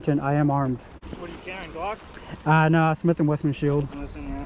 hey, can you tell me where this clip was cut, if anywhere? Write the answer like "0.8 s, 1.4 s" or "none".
1.0 s